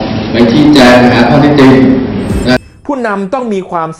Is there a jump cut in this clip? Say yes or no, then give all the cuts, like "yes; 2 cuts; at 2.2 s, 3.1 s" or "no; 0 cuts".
yes; 1 cut; at 2.6 s